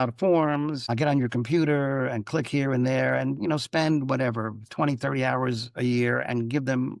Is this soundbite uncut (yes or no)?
yes